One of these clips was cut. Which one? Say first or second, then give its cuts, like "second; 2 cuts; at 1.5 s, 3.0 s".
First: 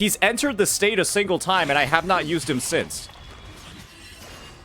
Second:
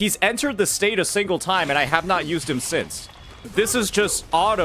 second; 1 cut; at 3.5 s